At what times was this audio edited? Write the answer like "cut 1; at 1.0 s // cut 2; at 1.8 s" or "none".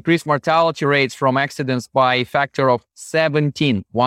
none